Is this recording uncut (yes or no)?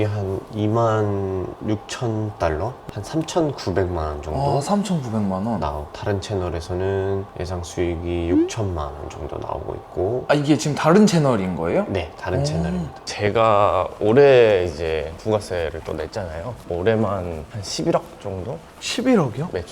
no